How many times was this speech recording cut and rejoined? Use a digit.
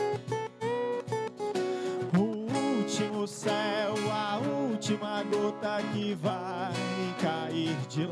0